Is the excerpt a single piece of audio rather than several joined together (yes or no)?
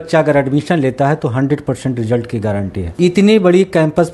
no